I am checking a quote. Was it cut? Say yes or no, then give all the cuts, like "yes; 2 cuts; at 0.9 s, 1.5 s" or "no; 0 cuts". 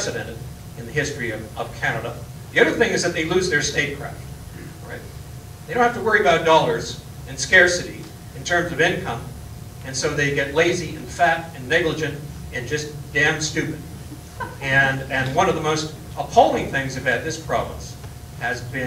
yes; 1 cut; at 2.3 s